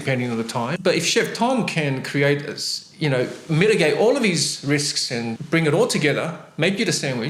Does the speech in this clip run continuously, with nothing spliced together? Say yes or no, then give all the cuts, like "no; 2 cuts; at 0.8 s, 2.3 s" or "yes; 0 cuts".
yes; 0 cuts